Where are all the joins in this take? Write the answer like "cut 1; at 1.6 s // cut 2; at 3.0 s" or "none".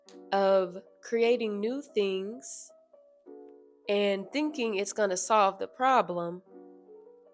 cut 1; at 2.5 s // cut 2; at 3.8 s